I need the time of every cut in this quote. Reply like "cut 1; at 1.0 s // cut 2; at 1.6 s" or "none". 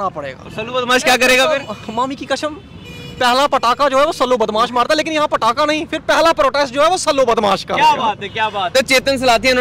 none

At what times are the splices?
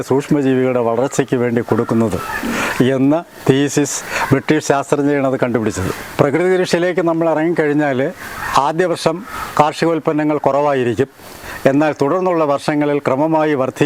none

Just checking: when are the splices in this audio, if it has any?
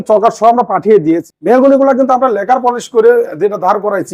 cut 1; at 1.3 s

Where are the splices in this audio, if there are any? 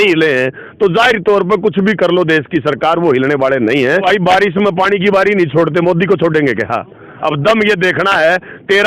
cut 1; at 4.0 s // cut 2; at 7.0 s

